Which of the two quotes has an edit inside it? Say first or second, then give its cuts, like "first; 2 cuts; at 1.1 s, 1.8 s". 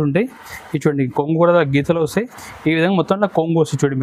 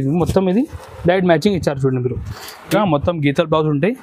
second; 1 cut; at 2.7 s